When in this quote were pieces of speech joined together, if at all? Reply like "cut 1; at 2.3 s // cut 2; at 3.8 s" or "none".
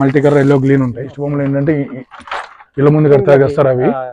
cut 1; at 1.2 s